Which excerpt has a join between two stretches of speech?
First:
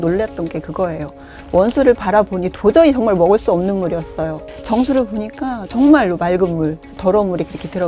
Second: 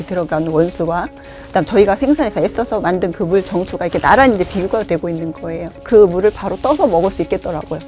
second; 1 cut; at 5.7 s

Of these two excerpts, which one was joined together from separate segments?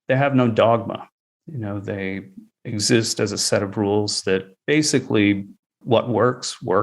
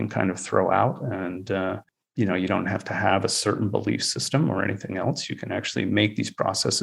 first; 3 cuts; at 2.4 s, 4.5 s, 5.7 s

